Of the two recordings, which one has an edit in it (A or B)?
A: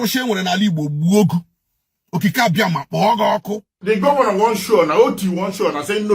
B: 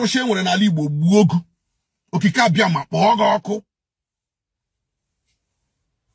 A